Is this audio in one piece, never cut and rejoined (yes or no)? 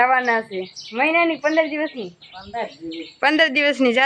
yes